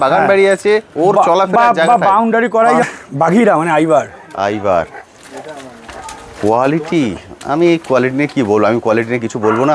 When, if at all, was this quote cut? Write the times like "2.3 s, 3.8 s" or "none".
2.8 s